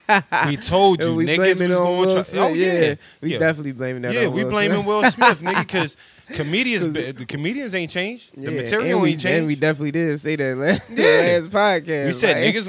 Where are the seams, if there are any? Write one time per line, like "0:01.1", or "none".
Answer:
none